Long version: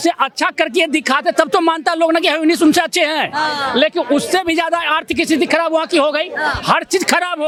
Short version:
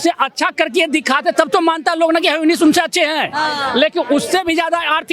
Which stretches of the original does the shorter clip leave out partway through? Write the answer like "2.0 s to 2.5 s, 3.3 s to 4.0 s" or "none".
none